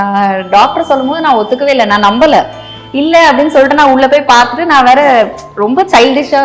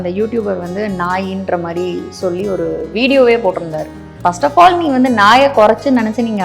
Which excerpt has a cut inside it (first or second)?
second